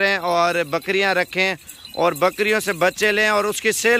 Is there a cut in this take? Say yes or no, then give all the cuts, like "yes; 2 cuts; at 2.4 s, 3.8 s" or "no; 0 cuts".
no; 0 cuts